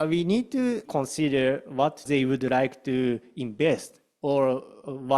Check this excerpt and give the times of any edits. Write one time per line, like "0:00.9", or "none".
0:00.8
0:02.0